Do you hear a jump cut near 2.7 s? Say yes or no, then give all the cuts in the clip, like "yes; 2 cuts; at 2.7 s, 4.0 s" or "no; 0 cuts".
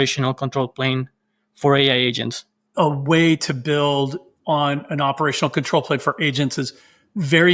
yes; 1 cut; at 2.7 s